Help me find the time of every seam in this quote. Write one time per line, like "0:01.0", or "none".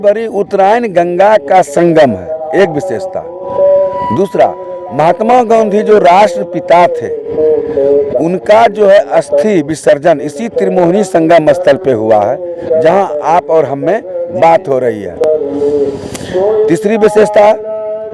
none